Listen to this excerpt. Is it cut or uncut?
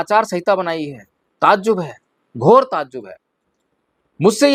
uncut